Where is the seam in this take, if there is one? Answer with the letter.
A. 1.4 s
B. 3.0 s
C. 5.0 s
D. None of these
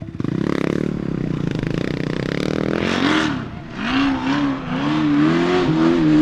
B